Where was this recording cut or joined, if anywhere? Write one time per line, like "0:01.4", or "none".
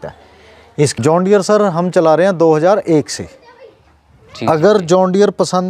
0:00.9